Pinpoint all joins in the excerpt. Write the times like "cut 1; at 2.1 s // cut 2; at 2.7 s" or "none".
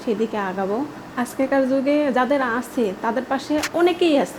cut 1; at 1.0 s